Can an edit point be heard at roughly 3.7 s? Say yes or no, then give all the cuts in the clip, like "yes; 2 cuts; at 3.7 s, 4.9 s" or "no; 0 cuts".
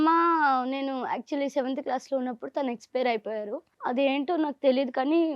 yes; 1 cut; at 3.7 s